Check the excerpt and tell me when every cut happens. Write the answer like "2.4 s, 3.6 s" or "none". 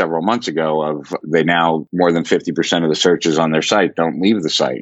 1.2 s